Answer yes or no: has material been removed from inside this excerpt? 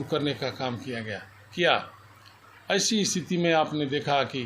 no